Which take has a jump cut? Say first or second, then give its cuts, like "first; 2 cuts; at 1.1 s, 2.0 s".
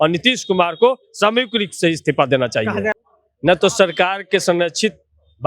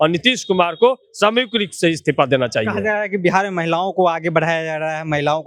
first; 1 cut; at 2.9 s